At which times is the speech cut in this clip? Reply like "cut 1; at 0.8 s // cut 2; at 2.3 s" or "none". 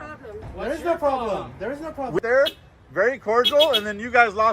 cut 1; at 2.2 s